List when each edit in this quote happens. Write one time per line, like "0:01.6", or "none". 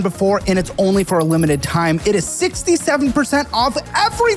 none